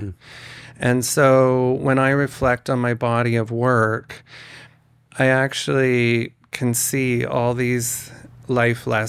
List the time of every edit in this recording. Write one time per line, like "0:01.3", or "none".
none